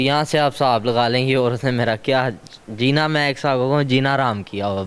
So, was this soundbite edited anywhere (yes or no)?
no